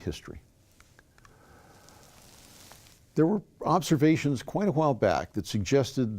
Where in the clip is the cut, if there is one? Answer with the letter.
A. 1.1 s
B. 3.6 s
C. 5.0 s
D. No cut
C